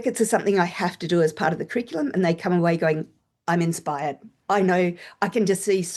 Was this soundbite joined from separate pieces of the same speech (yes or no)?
no